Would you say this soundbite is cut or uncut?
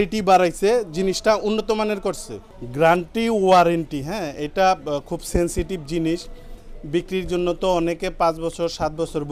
uncut